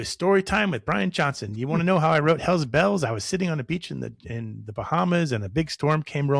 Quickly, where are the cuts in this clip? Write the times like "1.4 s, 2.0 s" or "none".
none